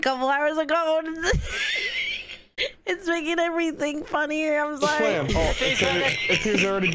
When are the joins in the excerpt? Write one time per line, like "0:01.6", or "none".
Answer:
0:05.3